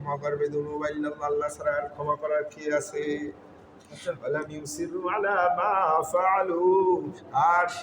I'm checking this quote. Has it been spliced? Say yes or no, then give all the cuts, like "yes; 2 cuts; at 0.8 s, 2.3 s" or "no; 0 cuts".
yes; 1 cut; at 4.2 s